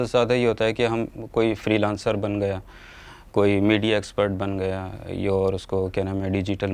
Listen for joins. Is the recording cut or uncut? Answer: uncut